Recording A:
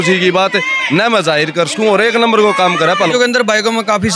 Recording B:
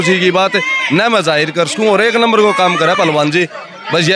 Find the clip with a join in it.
A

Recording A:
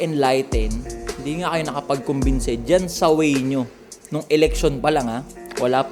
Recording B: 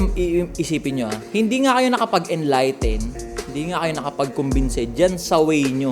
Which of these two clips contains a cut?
B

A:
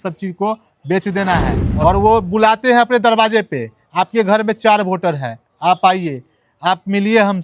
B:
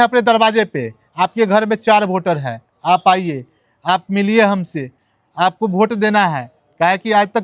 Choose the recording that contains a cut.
A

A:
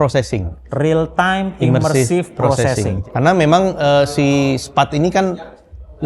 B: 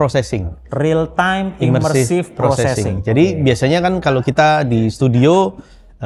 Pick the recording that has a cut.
A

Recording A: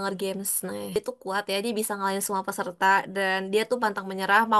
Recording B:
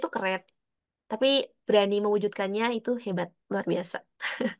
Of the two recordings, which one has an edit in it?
A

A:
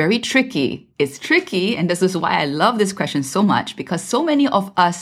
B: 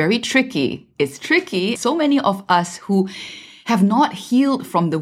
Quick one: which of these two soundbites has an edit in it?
B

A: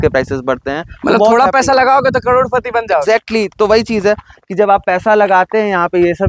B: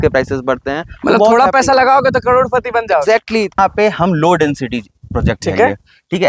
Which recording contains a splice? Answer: B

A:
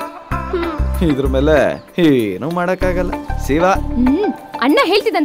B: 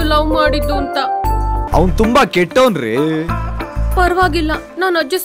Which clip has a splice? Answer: B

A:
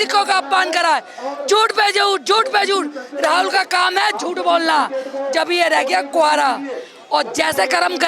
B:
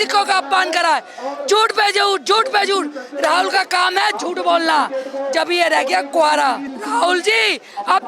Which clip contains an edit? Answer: B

